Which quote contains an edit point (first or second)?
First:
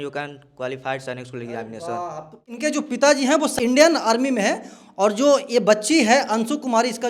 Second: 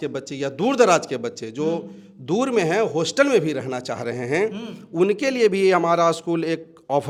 first